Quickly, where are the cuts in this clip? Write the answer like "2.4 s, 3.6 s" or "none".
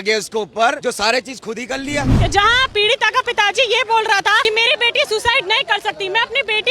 0.8 s, 2.1 s, 4.4 s